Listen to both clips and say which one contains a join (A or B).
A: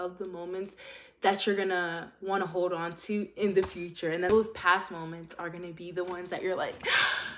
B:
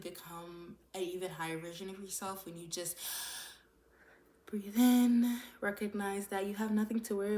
A